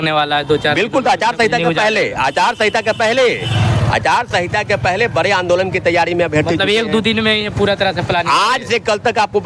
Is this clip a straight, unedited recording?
yes; 0 cuts

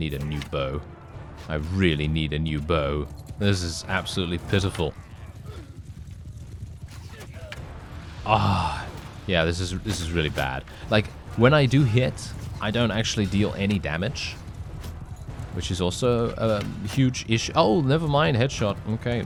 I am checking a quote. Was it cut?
no; 0 cuts

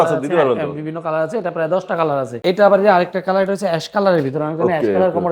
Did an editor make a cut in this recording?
yes; 1 cut; at 2.4 s

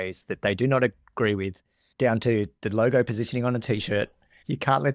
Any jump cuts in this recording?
no; 0 cuts

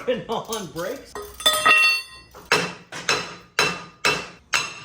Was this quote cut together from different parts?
yes; 1 cut; at 1.1 s

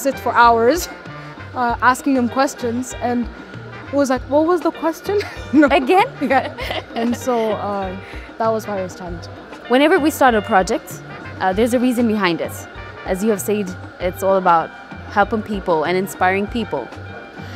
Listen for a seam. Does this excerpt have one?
no; 0 cuts

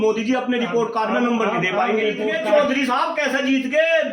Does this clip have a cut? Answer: yes; 1 cut; at 2.4 s

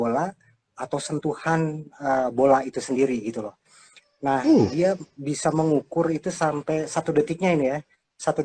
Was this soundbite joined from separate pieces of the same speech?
no; 0 cuts

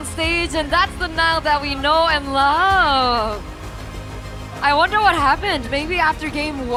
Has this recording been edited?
no; 0 cuts

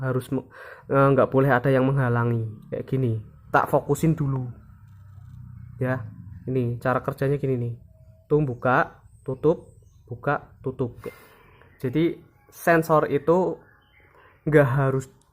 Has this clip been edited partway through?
yes; 1 cut; at 11.0 s

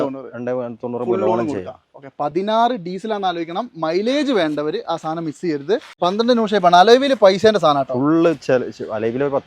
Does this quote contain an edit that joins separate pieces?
yes; 1 cut; at 5.9 s

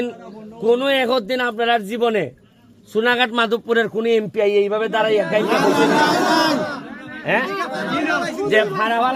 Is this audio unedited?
yes; 0 cuts

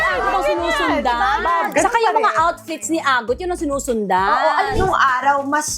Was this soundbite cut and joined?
yes; 2 cuts; at 1.7 s, 4.8 s

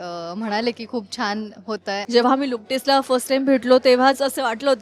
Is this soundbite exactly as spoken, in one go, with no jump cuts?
no; 1 cut; at 2.0 s

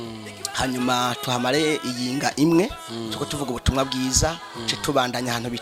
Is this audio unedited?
yes; 0 cuts

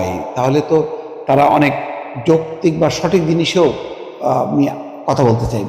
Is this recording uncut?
yes; 0 cuts

